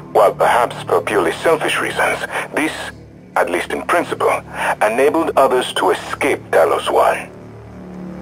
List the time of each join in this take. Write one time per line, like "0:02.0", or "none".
0:07.3